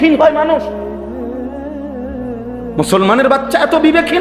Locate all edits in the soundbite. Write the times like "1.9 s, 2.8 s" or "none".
0.9 s, 2.4 s